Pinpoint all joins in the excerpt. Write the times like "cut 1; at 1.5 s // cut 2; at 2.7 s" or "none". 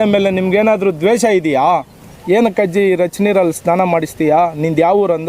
cut 1; at 2.0 s

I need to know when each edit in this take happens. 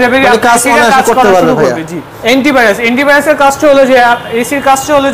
cut 1; at 2.1 s

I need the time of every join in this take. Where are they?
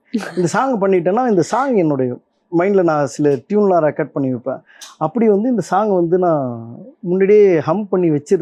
none

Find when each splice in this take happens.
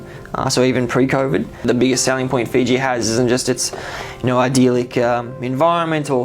cut 1; at 1.6 s

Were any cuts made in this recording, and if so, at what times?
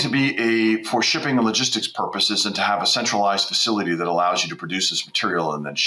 none

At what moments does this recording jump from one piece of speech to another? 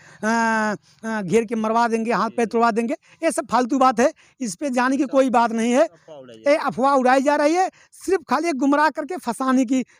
none

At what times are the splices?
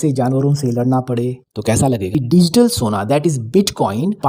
cut 1; at 2.1 s

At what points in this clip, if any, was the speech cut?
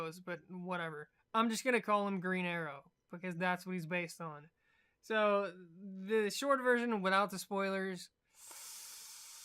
cut 1; at 1.9 s

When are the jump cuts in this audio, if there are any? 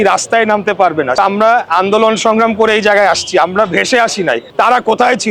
cut 1; at 1.2 s // cut 2; at 4.4 s

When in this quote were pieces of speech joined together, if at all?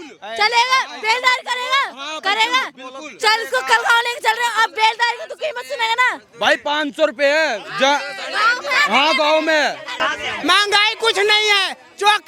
cut 1; at 10.1 s

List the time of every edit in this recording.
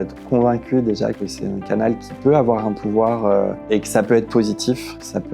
cut 1; at 1.3 s // cut 2; at 3.6 s

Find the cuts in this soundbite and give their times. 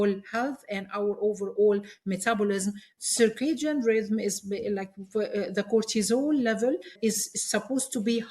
cut 1; at 2.9 s // cut 2; at 6.9 s

